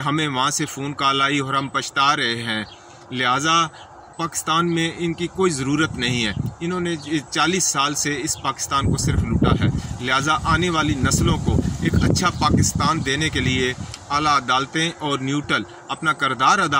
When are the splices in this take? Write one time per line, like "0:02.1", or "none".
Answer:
none